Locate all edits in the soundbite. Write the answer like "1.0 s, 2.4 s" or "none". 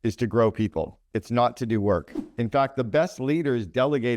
0.9 s, 2.2 s